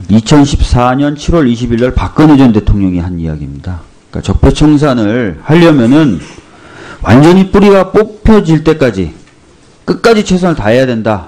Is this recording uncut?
no; 1 cut; at 6.7 s

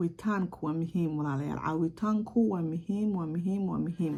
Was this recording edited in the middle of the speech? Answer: no; 0 cuts

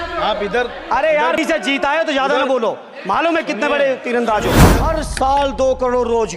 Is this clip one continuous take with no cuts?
no; 1 cut; at 4.7 s

